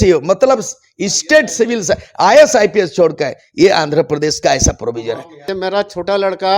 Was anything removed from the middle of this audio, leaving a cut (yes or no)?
yes